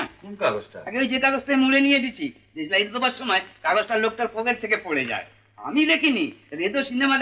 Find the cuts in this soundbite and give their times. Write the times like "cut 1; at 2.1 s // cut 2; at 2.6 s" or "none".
none